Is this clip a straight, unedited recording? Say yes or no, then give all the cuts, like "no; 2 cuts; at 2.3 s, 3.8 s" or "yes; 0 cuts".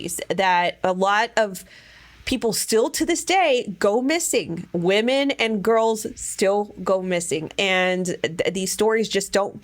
no; 1 cut; at 7.5 s